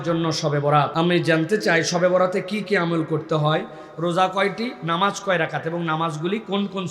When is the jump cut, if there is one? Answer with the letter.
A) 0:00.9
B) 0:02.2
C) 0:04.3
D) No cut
A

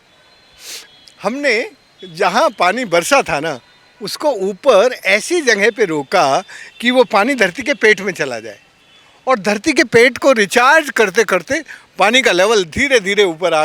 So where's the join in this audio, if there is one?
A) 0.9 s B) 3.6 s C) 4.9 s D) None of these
D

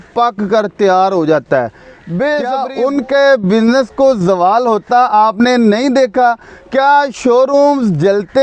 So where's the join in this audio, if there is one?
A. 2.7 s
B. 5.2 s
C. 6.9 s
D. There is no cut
A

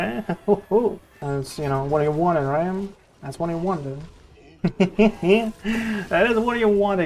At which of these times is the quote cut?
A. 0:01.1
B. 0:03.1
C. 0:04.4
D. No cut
A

